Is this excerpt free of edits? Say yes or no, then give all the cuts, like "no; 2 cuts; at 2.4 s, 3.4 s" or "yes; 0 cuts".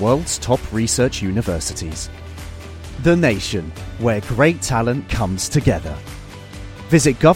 yes; 0 cuts